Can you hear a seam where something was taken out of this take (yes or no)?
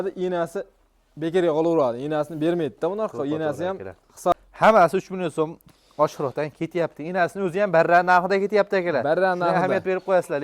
yes